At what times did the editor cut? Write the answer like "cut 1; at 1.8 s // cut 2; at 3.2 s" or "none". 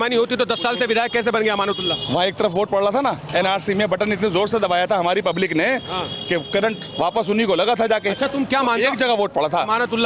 none

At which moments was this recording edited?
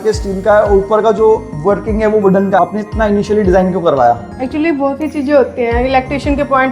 cut 1; at 2.6 s

